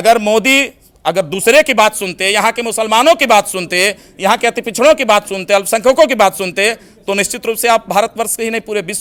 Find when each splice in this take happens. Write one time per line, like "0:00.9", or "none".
none